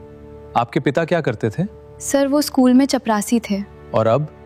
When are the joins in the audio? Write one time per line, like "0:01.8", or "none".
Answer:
none